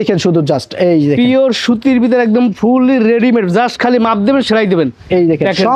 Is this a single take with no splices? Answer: yes; 0 cuts

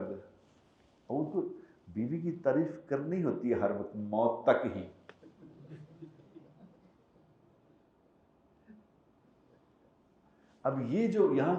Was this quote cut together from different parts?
no; 0 cuts

